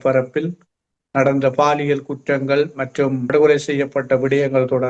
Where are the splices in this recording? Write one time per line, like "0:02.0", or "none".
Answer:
0:03.3